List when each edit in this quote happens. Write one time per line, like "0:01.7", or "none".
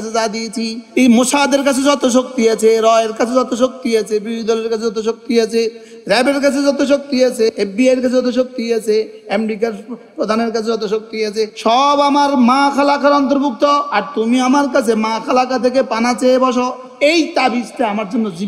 0:07.5
0:14.0
0:16.8